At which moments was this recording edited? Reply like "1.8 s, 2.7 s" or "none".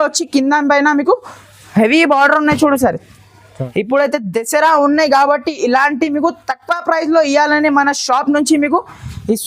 3.5 s